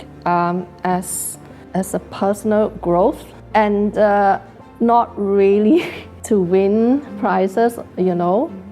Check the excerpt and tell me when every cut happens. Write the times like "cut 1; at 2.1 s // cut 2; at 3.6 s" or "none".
none

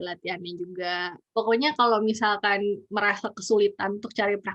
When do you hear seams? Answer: cut 1; at 1.2 s

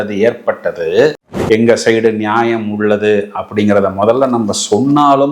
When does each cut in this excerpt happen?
cut 1; at 1.1 s

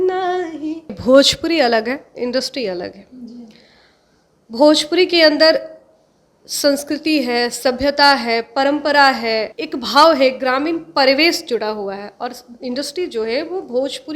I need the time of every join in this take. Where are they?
cut 1; at 0.9 s // cut 2; at 9.6 s

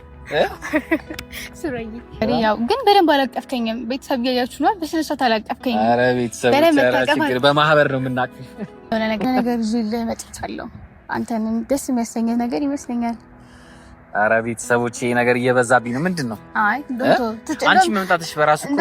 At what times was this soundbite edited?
cut 1; at 2.2 s // cut 2; at 8.9 s

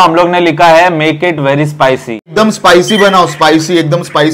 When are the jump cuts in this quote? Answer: cut 1; at 2.3 s

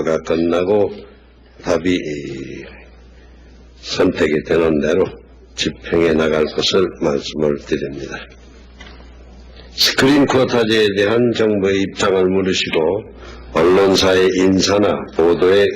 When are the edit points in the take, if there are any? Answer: cut 1; at 4.7 s

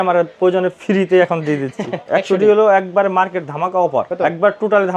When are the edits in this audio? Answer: cut 1; at 2.0 s // cut 2; at 4.1 s

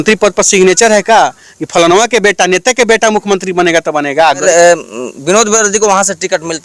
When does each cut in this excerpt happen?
cut 1; at 4.4 s

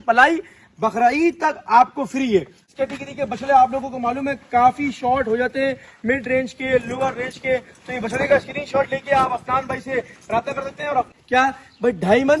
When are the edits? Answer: cut 1; at 2.6 s // cut 2; at 11.1 s

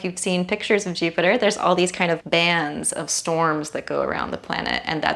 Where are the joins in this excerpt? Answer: cut 1; at 2.2 s

